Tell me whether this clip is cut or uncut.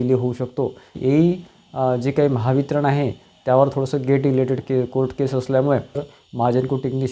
cut